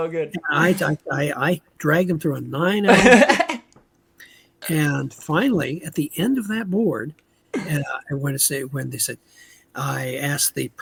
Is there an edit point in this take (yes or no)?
no